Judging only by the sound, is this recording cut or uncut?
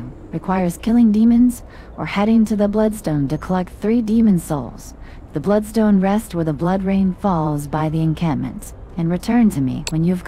uncut